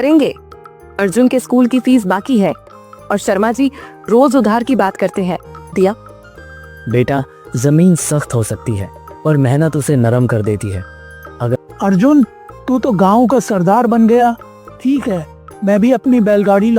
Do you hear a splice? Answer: yes; 2 cuts; at 5.7 s, 11.6 s

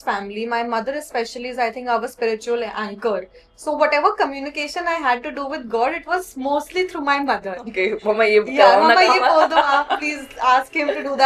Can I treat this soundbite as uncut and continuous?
yes; 0 cuts

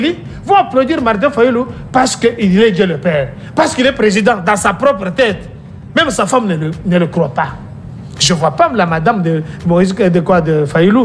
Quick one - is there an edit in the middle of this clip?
no; 0 cuts

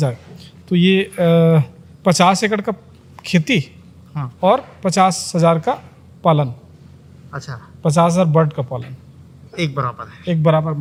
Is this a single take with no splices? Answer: yes; 0 cuts

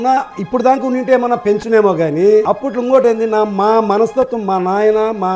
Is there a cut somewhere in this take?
yes; 1 cut; at 2.4 s

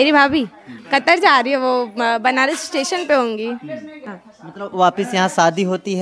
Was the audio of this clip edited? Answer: no; 0 cuts

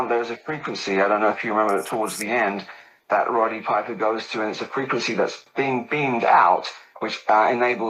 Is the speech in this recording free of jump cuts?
yes; 0 cuts

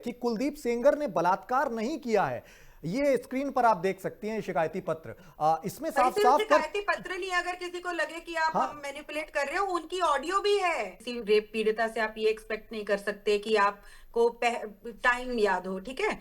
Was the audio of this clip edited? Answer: yes; 1 cut; at 11.1 s

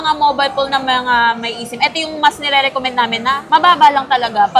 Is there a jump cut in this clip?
no; 0 cuts

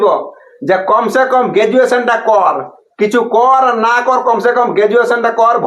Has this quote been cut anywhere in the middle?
no; 0 cuts

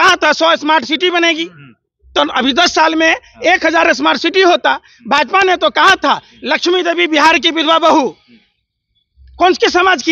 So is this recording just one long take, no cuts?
yes; 0 cuts

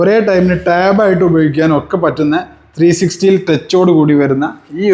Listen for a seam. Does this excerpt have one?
no; 0 cuts

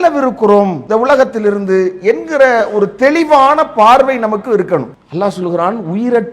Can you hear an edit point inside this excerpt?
yes; 1 cut; at 4.9 s

